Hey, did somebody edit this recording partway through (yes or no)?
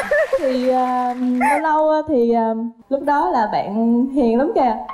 yes